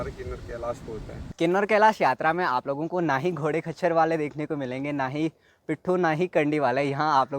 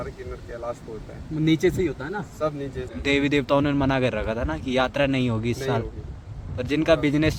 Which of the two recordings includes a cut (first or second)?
first